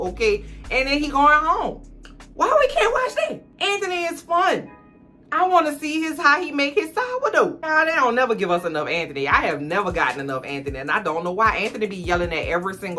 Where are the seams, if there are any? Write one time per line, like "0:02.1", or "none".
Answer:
0:07.6